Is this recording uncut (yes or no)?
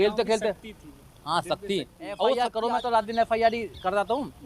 no